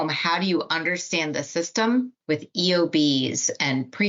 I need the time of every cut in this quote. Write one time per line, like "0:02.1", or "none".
0:02.2